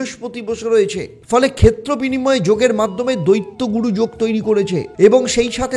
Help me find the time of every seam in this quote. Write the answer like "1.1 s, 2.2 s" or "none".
1.1 s, 4.9 s